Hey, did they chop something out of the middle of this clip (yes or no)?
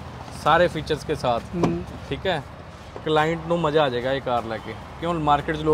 no